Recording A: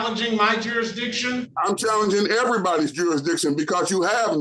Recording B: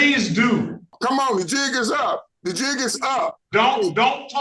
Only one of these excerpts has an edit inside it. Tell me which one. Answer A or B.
B